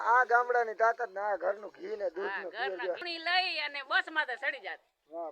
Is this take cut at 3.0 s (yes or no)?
yes